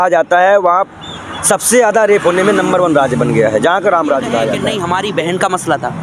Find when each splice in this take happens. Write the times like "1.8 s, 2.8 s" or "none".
4.7 s